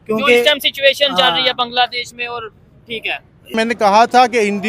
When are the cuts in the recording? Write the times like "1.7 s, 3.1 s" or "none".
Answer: 3.5 s